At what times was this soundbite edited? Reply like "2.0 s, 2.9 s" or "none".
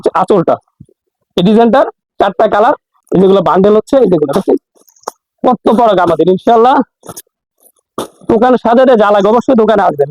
2.9 s

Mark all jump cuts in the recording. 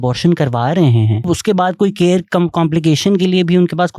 1.2 s

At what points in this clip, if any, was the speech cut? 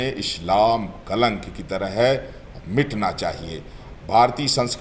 3.8 s

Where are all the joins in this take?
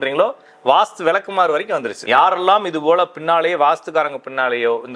1.9 s

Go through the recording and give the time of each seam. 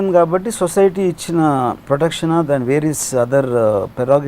1.9 s

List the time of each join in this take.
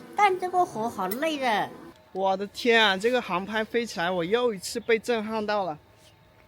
1.9 s

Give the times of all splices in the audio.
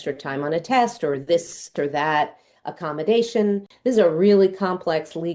3.7 s

